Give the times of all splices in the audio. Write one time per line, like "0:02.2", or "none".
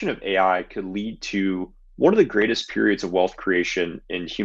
none